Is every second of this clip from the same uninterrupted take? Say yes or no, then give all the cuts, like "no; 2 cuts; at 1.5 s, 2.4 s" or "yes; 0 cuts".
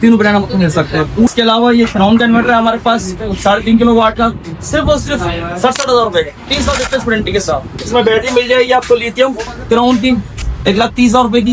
no; 2 cuts; at 1.3 s, 7.7 s